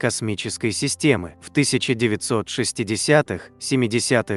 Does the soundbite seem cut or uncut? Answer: uncut